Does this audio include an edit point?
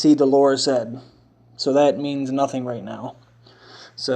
no; 0 cuts

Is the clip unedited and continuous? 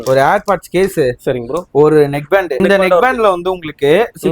no; 1 cut; at 2.6 s

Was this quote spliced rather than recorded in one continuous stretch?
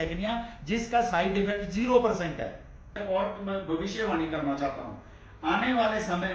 yes; 1 cut; at 2.9 s

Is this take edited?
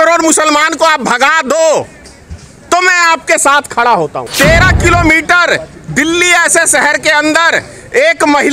yes; 1 cut; at 4.2 s

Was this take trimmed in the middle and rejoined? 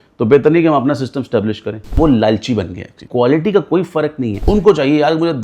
yes; 3 cuts; at 1.9 s, 3.0 s, 4.4 s

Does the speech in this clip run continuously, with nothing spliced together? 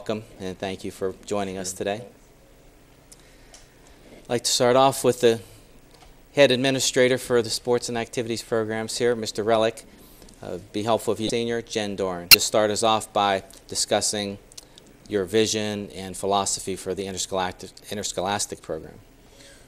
no; 2 cuts; at 11.3 s, 12.4 s

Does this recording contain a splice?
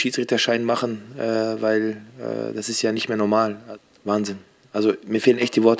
yes; 1 cut; at 3.6 s

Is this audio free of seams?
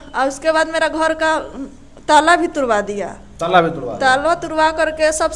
yes; 0 cuts

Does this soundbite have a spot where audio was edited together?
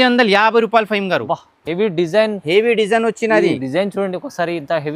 no; 0 cuts

